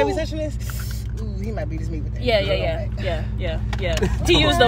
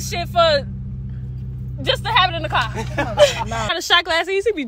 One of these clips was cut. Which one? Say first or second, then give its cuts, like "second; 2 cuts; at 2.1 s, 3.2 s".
second; 1 cut; at 3.8 s